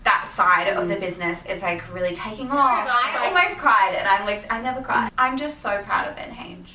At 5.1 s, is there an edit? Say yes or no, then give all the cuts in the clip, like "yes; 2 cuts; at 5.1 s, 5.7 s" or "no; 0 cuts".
yes; 2 cuts; at 3.0 s, 5.1 s